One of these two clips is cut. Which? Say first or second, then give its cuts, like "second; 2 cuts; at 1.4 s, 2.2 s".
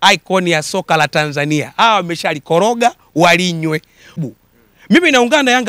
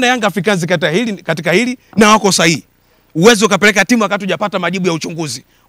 first; 1 cut; at 4.2 s